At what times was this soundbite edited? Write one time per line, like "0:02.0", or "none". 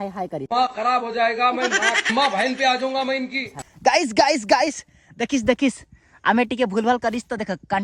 0:03.5